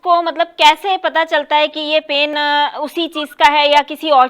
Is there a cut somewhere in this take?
yes; 1 cut; at 2.3 s

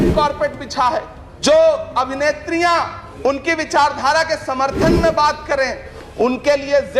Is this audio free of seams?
no; 3 cuts; at 1.2 s, 3.0 s, 5.9 s

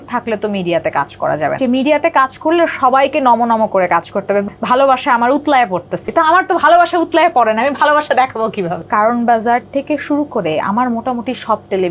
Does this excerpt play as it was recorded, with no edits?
no; 4 cuts; at 1.6 s, 4.5 s, 6.1 s, 8.8 s

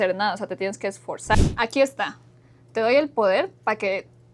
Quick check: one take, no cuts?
no; 1 cut; at 1.5 s

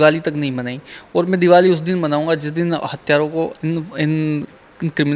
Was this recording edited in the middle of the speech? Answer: no; 0 cuts

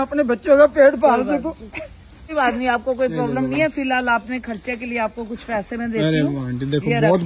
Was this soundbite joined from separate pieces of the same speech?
yes; 1 cut; at 2.3 s

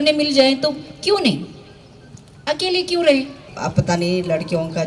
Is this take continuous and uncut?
no; 1 cut; at 3.5 s

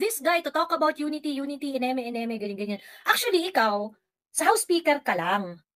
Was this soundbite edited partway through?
no; 0 cuts

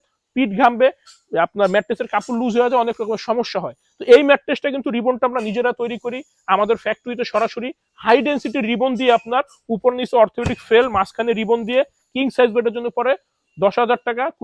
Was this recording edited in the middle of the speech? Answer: no; 0 cuts

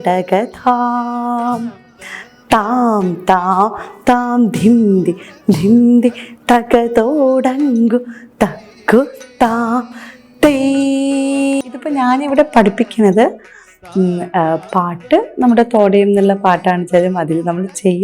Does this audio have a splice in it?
yes; 1 cut; at 11.7 s

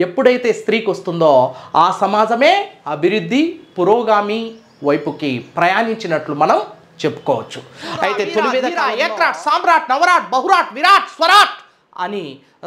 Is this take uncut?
no; 1 cut; at 8.8 s

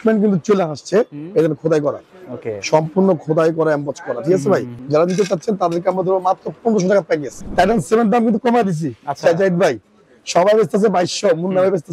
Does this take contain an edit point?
yes; 2 cuts; at 4.7 s, 7.3 s

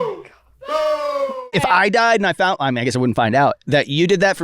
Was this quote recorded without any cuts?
no; 1 cut; at 1.5 s

